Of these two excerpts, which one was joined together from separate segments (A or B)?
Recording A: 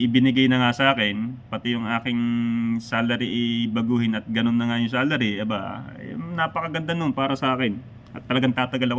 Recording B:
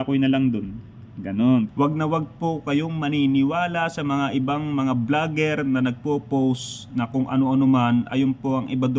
B